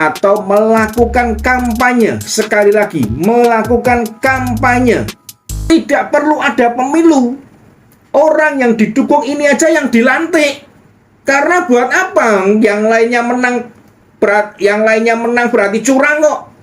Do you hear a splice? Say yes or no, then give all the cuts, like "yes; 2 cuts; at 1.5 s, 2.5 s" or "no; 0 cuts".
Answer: yes; 1 cut; at 5.5 s